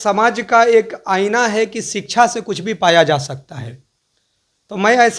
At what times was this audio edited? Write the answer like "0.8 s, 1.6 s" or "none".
none